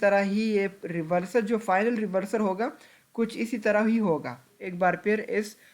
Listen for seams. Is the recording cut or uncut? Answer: cut